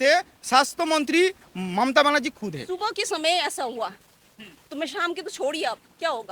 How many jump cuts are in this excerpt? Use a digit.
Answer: 1